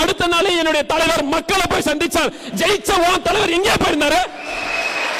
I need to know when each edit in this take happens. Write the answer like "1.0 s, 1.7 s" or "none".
none